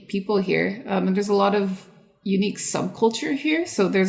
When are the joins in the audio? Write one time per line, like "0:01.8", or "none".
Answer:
none